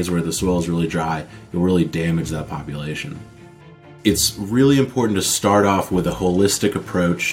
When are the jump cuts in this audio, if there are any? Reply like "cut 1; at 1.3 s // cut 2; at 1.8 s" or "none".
cut 1; at 3.6 s